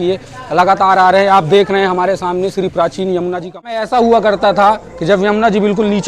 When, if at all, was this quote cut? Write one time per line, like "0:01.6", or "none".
0:03.8